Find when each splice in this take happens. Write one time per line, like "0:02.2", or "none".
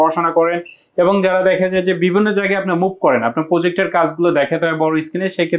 none